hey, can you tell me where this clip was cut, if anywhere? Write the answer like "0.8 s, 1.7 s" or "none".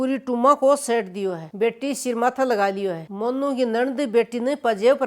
none